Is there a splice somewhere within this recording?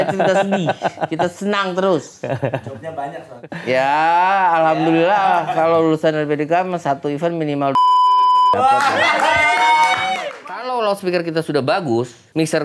yes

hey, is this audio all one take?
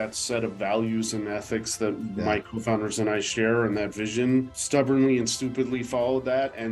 no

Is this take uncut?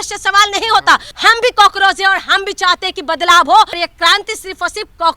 no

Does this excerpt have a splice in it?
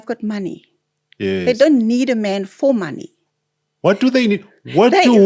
no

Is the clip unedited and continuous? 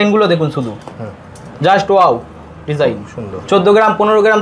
yes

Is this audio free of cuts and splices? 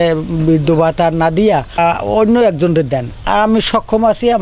no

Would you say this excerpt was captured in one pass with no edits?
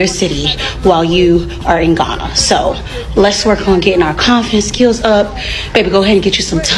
yes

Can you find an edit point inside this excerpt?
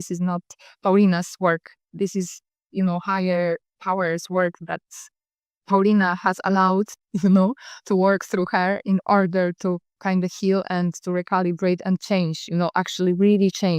yes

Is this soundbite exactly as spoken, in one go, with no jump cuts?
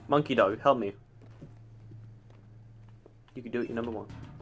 yes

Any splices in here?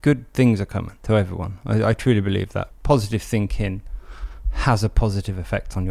yes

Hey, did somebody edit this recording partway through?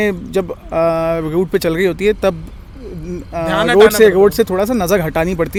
no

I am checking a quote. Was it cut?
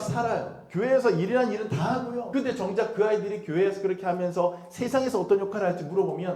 yes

